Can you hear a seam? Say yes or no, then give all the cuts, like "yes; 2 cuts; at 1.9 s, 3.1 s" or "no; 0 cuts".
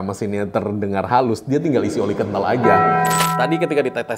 yes; 1 cut; at 3.3 s